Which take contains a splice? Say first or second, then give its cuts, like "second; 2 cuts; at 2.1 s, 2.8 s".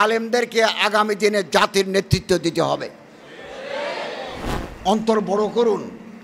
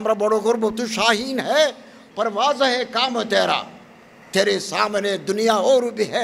first; 1 cut; at 4.6 s